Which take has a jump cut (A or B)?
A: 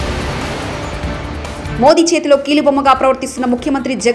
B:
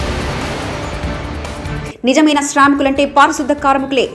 B